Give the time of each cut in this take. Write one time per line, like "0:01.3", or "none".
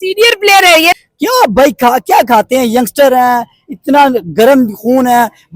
0:01.0